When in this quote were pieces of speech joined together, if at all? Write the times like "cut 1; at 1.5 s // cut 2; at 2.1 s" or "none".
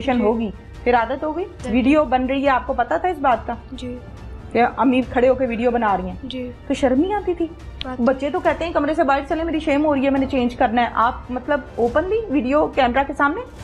cut 1; at 1.6 s